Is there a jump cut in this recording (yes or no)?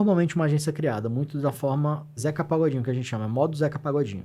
yes